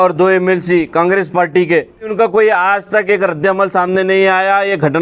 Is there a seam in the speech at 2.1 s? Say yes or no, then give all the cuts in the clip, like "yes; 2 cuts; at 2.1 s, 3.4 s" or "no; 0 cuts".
yes; 1 cut; at 2.1 s